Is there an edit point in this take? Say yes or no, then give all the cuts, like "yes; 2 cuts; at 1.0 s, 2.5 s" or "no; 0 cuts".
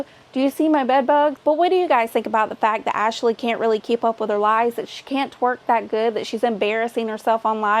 yes; 1 cut; at 1.4 s